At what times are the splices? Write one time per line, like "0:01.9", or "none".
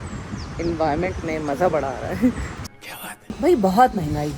0:03.3